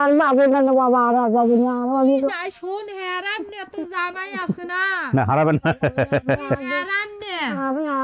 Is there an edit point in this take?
no; 0 cuts

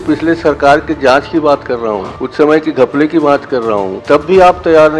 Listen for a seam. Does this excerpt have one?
yes; 2 cuts; at 2.2 s, 3.9 s

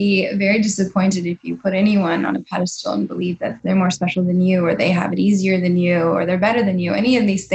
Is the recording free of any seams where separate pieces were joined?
no; 1 cut; at 3.5 s

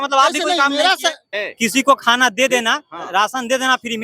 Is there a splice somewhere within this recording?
yes; 1 cut; at 1.2 s

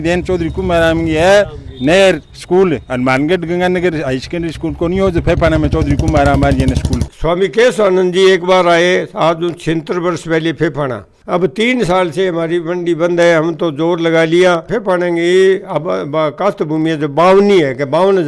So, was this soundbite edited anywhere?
yes; 3 cuts; at 7.0 s, 11.2 s, 14.7 s

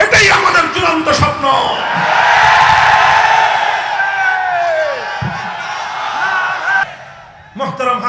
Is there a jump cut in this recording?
yes; 1 cut; at 6.8 s

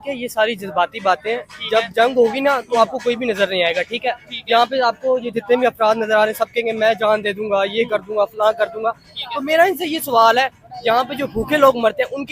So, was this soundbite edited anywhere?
no; 0 cuts

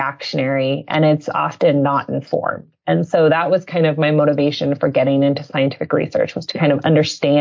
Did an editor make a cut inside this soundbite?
no; 0 cuts

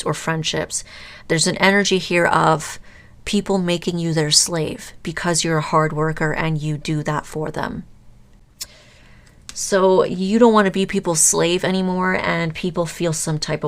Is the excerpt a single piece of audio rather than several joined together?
no; 1 cut; at 8.8 s

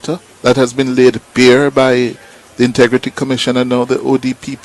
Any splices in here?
no; 0 cuts

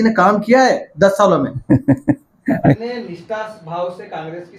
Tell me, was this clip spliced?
yes; 1 cut; at 2.8 s

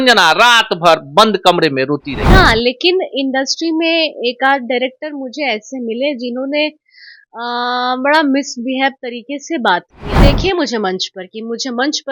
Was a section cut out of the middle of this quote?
yes; 2 cuts; at 2.2 s, 10.2 s

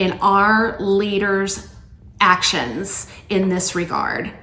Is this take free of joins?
yes; 0 cuts

